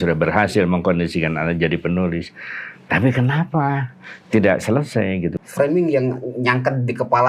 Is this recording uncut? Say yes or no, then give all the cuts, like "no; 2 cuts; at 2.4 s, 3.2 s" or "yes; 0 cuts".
no; 1 cut; at 5.4 s